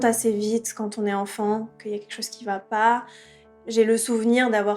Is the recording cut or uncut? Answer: cut